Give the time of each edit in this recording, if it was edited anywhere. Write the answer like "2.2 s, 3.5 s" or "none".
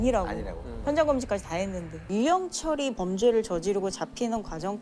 2.1 s